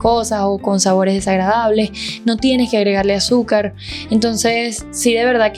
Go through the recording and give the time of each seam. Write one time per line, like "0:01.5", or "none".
none